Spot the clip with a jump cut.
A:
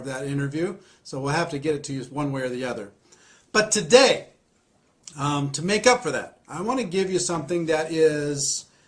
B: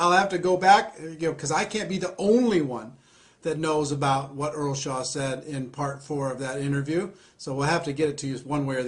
B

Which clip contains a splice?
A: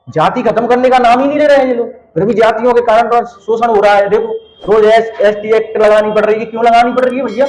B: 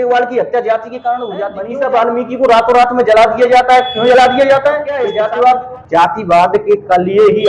B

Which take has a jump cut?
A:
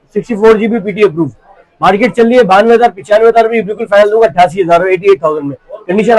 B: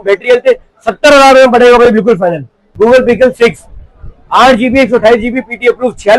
B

